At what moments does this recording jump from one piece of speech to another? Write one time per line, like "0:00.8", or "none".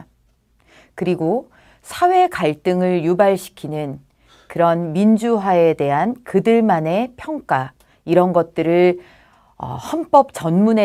none